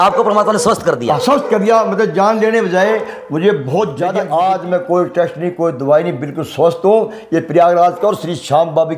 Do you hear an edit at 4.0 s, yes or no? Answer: yes